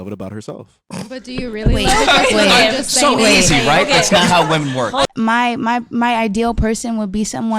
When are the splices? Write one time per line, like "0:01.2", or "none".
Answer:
0:05.0